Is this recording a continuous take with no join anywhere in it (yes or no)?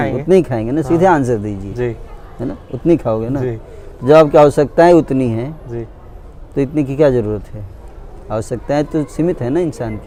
yes